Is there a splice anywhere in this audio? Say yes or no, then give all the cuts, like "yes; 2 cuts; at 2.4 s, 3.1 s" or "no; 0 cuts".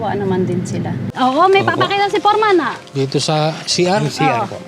yes; 1 cut; at 1.1 s